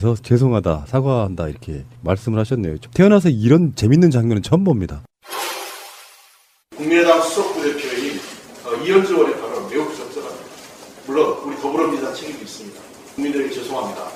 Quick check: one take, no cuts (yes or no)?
yes